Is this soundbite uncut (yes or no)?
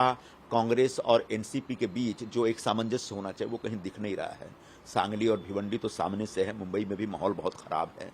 yes